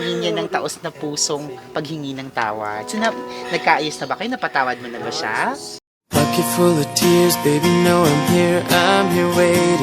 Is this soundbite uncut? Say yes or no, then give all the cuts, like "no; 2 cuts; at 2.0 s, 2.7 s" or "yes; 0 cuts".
no; 1 cut; at 5.7 s